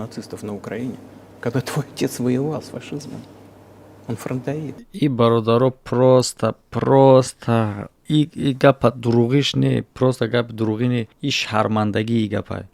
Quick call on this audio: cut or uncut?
uncut